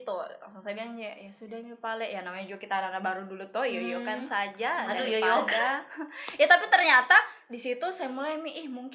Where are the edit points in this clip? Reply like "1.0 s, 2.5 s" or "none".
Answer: none